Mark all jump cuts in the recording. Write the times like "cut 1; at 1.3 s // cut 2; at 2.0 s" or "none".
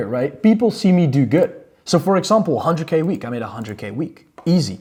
none